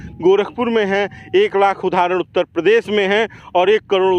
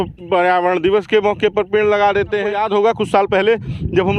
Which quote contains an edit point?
second; 1 cut; at 2.5 s

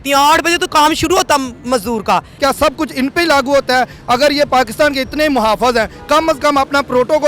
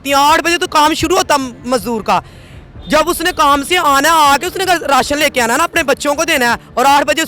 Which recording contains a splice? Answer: first; 1 cut; at 2.3 s

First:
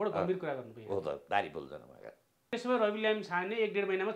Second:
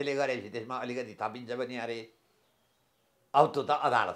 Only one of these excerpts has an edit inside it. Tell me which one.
first; 1 cut; at 2.5 s

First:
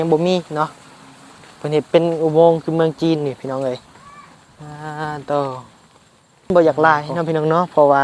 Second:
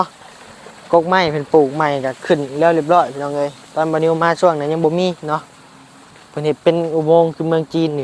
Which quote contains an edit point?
first; 1 cut; at 6.5 s

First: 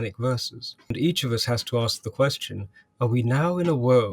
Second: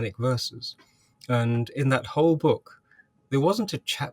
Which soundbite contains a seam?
first; 1 cut; at 0.9 s

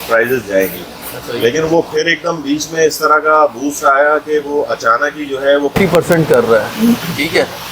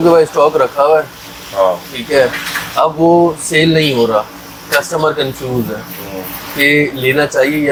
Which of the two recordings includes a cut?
first; 1 cut; at 5.7 s

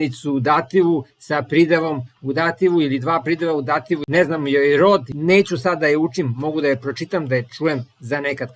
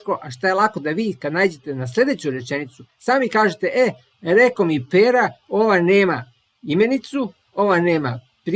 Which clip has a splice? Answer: first; 2 cuts; at 4.0 s, 5.1 s

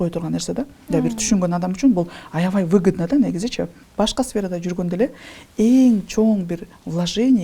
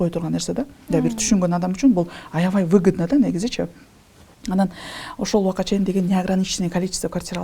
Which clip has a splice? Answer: first; 1 cut; at 3.8 s

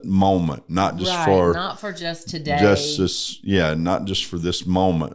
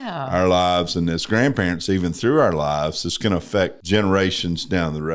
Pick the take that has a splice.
second; 1 cut; at 3.8 s

